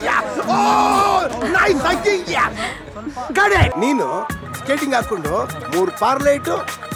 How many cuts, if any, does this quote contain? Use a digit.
1